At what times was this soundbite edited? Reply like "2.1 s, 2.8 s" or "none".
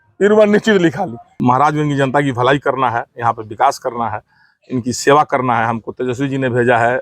1.3 s